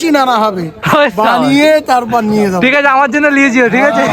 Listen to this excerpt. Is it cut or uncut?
uncut